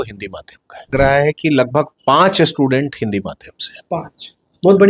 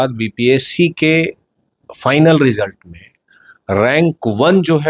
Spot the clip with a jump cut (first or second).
first